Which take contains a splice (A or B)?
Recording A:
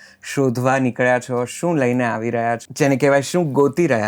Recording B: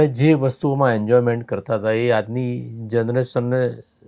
A